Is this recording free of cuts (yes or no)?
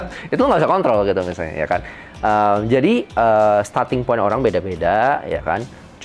yes